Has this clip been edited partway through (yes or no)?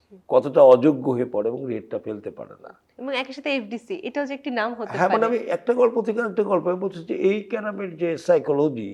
no